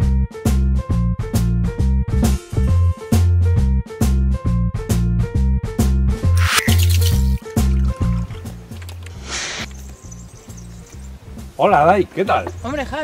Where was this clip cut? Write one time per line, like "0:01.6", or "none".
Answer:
0:11.5